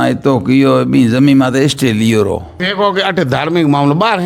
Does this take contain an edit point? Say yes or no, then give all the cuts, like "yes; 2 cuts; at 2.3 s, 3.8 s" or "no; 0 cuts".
yes; 1 cut; at 2.5 s